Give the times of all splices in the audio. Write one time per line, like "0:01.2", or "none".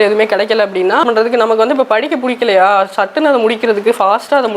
0:01.0